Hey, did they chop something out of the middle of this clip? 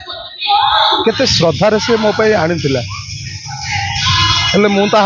no; 0 cuts

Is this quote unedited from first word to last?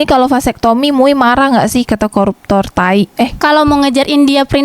no; 1 cut; at 3.3 s

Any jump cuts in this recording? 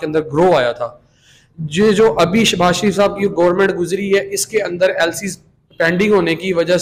no; 0 cuts

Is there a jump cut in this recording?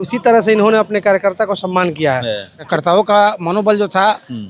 yes; 1 cut; at 2.7 s

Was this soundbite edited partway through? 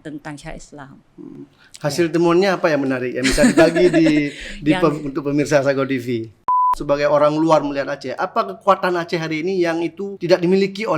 yes; 2 cuts; at 6.7 s, 10.1 s

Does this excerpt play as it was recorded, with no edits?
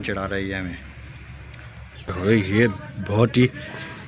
no; 1 cut; at 2.2 s

